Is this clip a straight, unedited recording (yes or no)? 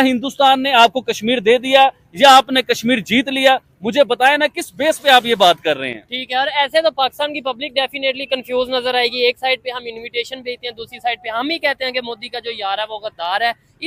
yes